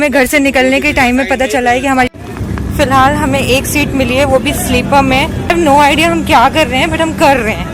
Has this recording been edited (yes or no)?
yes